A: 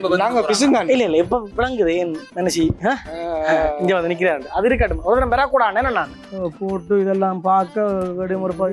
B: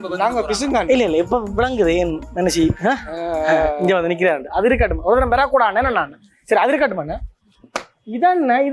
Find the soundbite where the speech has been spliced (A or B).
A